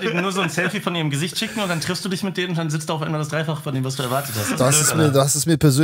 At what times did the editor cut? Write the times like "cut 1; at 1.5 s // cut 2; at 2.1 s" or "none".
none